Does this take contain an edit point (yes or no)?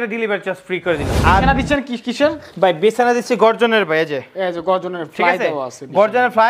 yes